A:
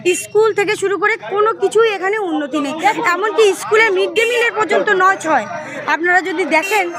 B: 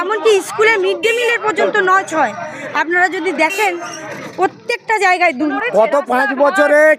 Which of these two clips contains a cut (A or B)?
B